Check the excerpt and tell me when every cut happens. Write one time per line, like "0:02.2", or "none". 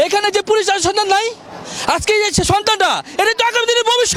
none

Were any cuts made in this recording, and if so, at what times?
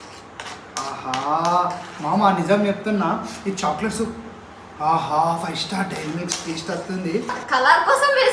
0:07.3

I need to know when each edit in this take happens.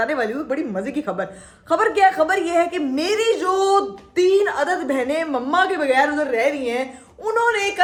none

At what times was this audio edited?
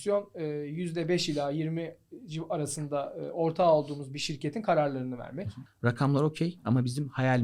0:05.6

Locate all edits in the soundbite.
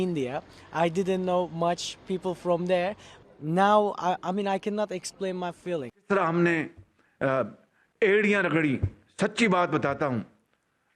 0:03.1
0:05.9

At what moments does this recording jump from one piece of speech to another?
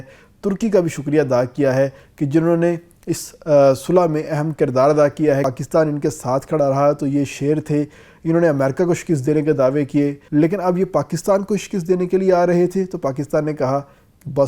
0:05.5
0:10.2

